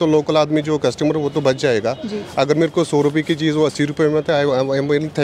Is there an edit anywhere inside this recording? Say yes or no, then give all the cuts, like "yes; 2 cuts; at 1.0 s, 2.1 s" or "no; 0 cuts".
no; 0 cuts